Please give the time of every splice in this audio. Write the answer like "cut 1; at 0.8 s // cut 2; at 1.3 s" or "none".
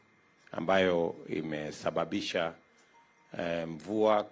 cut 1; at 1.7 s